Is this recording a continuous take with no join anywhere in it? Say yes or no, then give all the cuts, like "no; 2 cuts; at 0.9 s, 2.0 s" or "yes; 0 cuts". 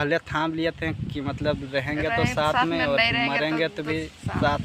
yes; 0 cuts